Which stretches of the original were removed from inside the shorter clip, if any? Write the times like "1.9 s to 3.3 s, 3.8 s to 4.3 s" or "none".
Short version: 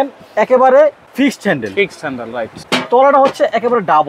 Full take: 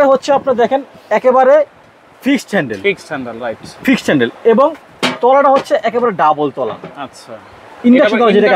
1.8 s to 2.1 s, 3.7 s to 4.9 s